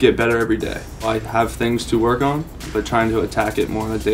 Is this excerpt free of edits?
no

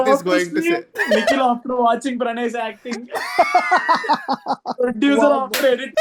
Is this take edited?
no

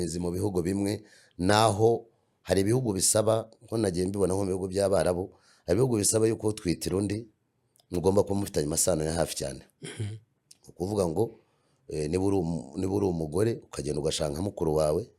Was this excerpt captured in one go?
yes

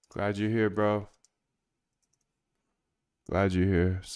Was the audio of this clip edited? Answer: no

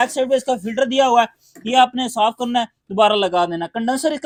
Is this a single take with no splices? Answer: yes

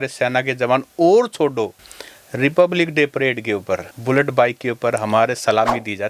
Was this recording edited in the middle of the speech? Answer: no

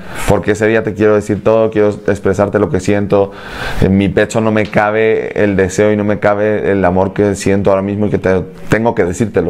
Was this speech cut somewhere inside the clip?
no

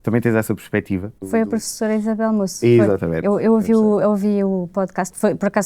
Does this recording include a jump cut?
yes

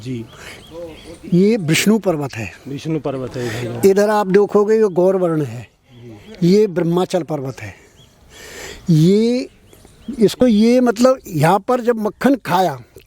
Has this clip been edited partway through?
yes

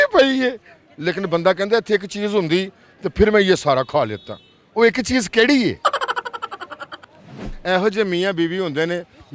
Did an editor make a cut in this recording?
yes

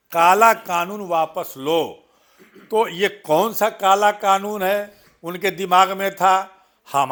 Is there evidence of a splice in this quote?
no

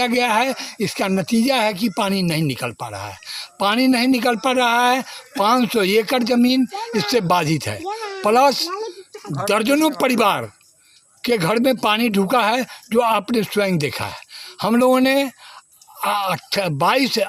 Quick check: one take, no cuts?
yes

